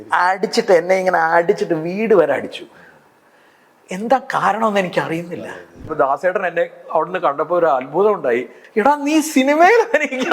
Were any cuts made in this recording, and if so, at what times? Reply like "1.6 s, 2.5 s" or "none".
5.9 s, 8.6 s